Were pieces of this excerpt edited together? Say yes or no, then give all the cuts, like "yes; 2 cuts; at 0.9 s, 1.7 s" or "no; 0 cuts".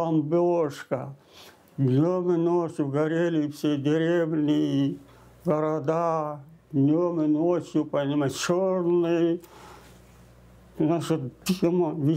no; 0 cuts